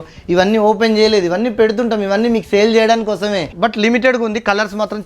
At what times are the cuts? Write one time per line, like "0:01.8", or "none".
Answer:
0:03.5

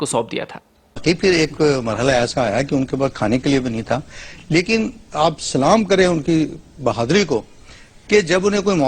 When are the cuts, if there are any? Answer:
0:01.0

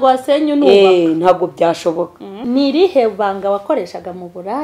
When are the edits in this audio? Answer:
0:02.4

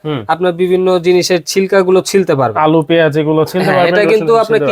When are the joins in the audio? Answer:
none

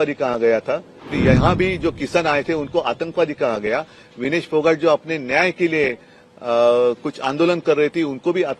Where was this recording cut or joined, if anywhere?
0:01.2

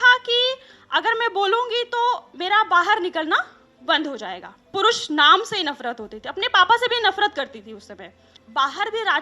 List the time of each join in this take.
0:04.7
0:08.2

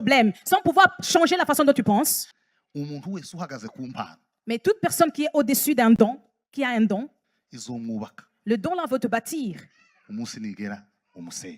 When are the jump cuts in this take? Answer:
0:02.2

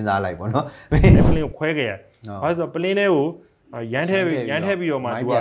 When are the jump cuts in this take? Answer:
0:01.2

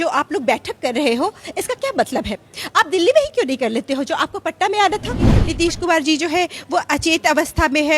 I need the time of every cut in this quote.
0:05.4

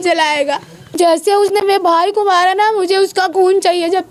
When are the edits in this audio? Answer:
0:01.0

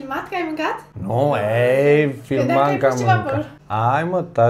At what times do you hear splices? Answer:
0:00.9
0:03.6

